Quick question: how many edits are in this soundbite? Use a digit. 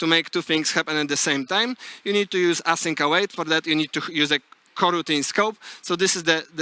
0